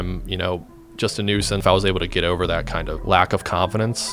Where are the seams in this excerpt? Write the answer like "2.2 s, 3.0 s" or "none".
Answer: 1.6 s, 2.9 s